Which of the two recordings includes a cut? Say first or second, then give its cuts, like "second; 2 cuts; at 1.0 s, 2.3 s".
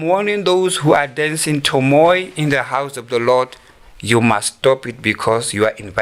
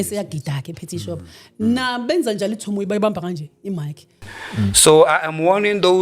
second; 1 cut; at 4.3 s